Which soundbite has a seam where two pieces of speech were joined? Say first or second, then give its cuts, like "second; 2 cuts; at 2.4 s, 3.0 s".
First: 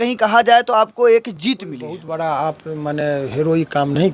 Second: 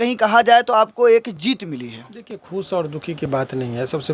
first; 1 cut; at 2.0 s